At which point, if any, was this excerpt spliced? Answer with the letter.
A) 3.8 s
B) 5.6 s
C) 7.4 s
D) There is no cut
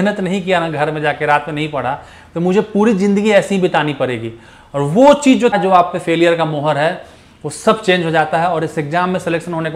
B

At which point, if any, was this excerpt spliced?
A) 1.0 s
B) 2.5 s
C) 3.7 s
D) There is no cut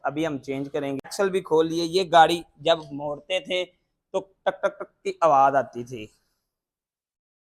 A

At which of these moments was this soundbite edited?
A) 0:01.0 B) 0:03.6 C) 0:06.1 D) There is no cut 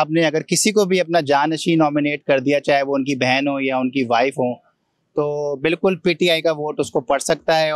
D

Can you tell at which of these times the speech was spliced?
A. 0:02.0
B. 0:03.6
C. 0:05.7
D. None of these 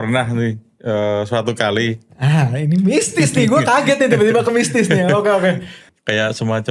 C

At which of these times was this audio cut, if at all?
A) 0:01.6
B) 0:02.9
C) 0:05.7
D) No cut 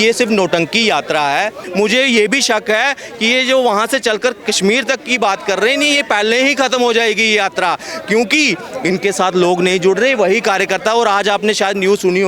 A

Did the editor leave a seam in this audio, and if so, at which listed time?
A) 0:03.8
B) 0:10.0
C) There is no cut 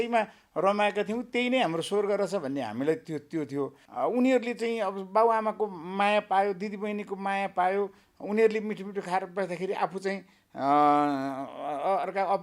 A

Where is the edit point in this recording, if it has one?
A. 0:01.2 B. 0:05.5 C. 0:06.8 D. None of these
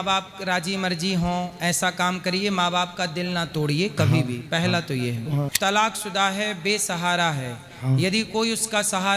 B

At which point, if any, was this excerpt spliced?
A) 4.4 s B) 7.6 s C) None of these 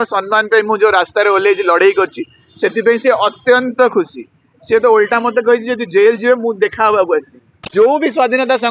B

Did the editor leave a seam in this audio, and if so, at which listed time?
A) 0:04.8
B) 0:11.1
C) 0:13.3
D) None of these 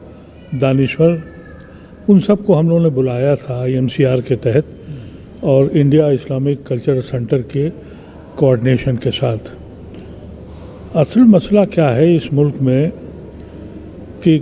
D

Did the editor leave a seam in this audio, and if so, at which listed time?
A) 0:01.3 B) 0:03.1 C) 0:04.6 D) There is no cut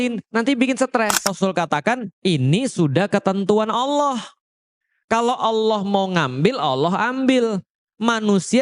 A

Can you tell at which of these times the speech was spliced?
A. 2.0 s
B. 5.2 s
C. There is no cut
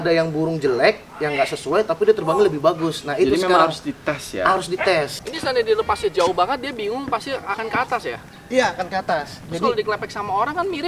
B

